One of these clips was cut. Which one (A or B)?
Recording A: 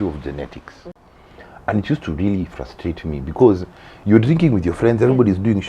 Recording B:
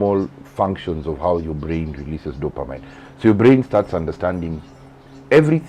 A